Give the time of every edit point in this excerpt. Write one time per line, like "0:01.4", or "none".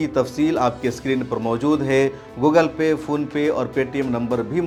none

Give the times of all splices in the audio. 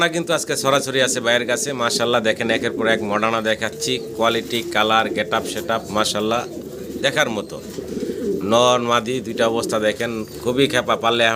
none

